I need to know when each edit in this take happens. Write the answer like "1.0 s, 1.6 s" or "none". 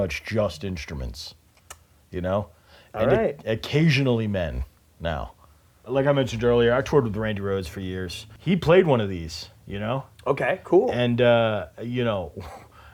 none